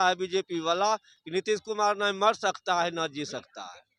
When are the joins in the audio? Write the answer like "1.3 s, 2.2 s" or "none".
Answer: none